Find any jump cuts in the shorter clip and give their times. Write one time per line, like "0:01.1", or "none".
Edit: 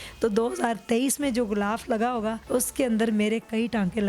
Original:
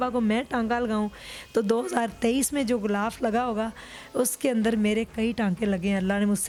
0:02.4